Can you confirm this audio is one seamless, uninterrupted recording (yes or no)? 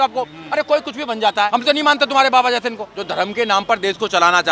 no